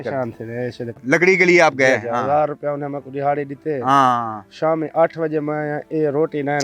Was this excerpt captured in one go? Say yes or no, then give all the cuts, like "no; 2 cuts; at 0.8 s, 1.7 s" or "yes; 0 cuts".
no; 1 cut; at 0.9 s